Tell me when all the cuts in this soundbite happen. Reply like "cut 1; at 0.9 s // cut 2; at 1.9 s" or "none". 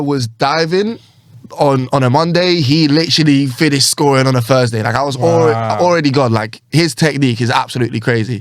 none